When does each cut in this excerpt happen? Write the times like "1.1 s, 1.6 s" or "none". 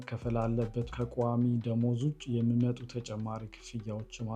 0.9 s